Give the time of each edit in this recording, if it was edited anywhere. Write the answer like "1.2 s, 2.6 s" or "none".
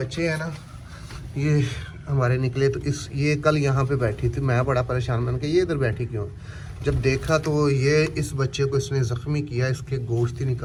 none

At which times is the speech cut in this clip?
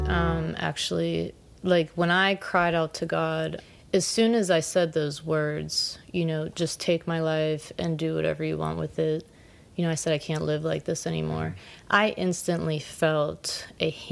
3.6 s

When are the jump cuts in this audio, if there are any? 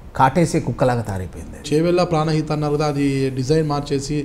1.6 s

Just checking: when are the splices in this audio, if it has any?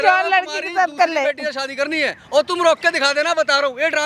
none

